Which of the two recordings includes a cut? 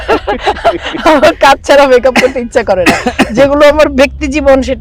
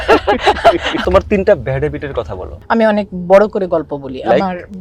second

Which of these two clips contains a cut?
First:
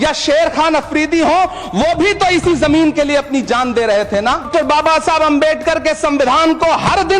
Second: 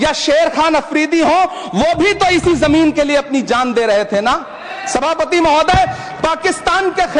first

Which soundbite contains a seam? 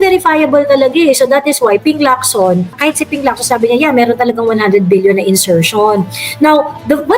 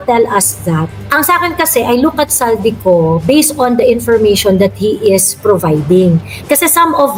first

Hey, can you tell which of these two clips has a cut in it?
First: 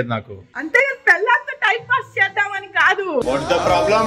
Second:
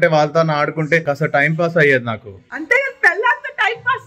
second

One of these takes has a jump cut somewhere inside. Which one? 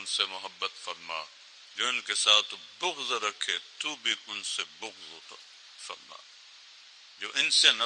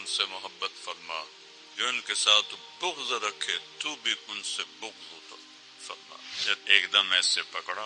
second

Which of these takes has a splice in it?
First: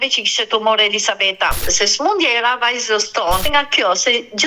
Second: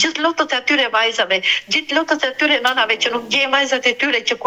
first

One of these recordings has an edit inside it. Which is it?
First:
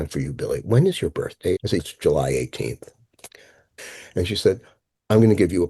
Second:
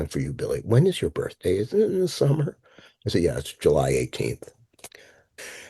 first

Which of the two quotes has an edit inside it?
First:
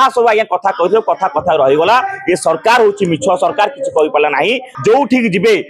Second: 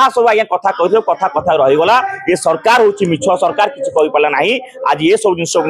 first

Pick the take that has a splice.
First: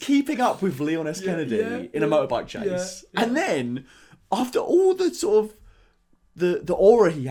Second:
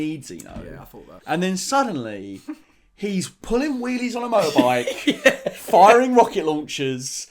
second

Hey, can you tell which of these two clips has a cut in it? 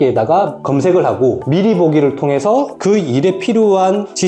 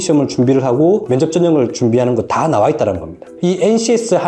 second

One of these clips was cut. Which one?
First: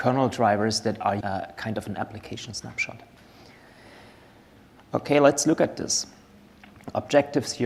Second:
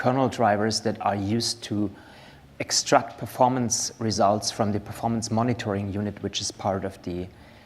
second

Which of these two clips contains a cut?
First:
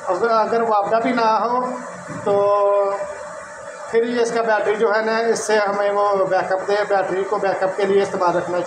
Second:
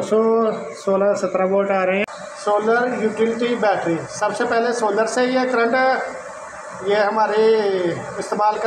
second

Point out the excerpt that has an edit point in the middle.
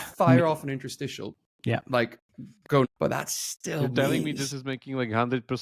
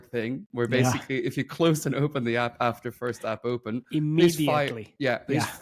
first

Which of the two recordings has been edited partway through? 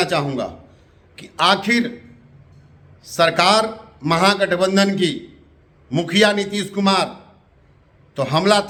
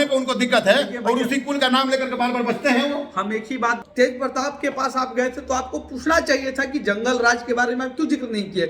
second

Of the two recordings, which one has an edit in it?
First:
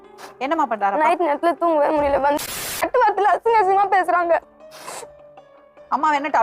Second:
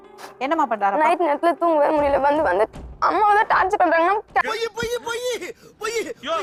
first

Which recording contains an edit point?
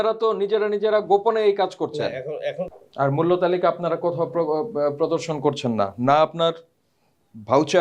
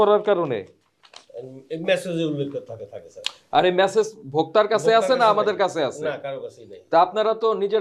first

